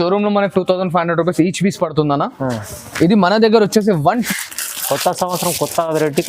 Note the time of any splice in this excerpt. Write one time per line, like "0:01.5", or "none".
0:04.3